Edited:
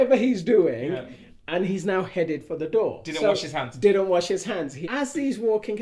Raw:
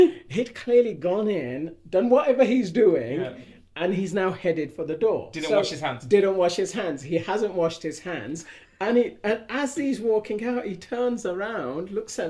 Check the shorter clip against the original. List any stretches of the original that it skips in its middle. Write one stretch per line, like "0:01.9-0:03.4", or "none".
0:07.1-0:09.4